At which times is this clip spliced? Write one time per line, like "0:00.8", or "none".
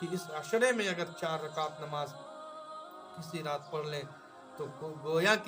none

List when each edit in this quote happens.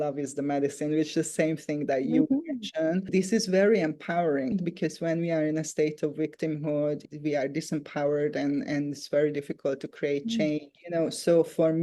0:03.1
0:04.6

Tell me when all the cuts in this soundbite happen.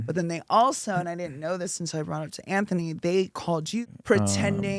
0:03.8

